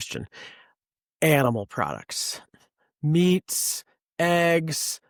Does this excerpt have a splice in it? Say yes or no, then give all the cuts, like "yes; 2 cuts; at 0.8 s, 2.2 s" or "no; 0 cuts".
no; 0 cuts